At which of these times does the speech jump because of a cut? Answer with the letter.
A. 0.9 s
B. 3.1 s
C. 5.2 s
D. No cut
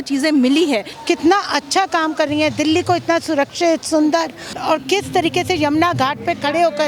A